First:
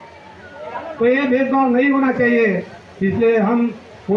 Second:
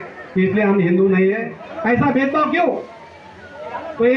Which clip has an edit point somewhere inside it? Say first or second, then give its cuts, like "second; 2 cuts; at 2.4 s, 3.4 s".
second; 1 cut; at 1.5 s